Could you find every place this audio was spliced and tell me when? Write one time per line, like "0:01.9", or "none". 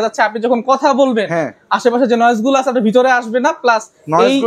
none